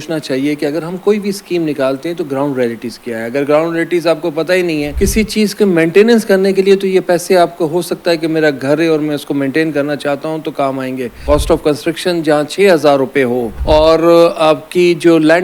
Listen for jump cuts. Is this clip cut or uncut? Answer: cut